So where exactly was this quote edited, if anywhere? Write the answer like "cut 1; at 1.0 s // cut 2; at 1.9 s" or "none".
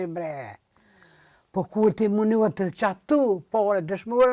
none